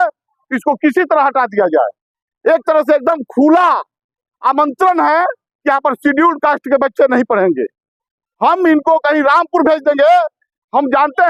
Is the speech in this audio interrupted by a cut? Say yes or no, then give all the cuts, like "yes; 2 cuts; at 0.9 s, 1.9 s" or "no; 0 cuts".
no; 0 cuts